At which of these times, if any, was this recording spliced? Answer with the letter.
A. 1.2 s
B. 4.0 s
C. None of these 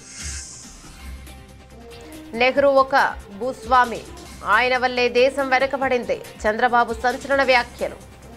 C